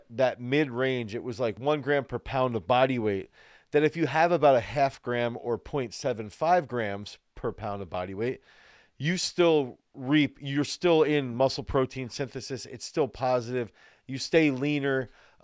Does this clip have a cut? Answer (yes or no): yes